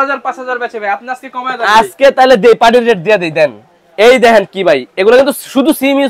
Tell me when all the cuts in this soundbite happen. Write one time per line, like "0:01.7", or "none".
none